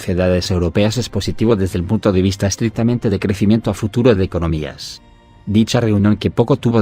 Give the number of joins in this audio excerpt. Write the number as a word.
one